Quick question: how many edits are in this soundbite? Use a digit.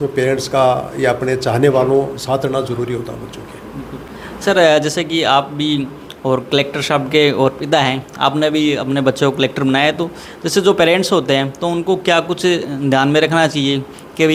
0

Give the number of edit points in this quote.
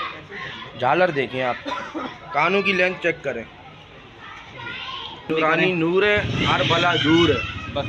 1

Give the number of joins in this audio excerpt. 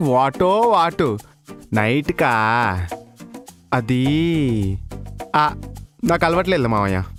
0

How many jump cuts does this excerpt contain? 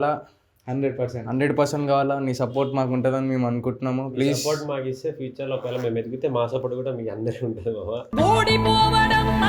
0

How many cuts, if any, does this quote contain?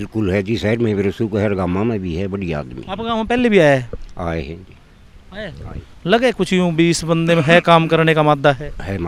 0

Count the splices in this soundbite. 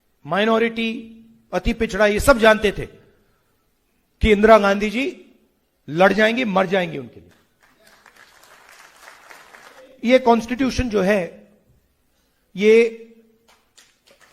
1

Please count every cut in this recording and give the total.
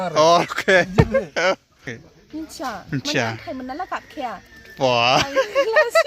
1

